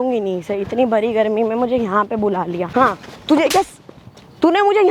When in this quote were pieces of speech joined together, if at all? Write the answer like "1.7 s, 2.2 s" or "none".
2.7 s